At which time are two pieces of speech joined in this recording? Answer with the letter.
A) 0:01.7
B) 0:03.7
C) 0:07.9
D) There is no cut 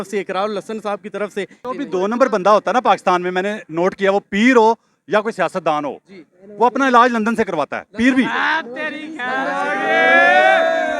A